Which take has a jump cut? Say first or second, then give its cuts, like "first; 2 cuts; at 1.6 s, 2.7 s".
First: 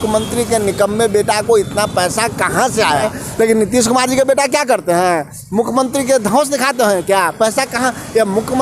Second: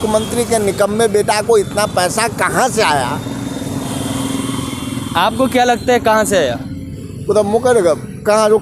first; 1 cut; at 3.1 s